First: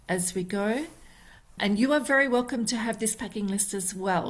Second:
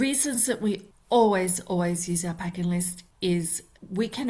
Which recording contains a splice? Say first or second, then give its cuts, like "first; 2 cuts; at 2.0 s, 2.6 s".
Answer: second; 2 cuts; at 0.9 s, 3.3 s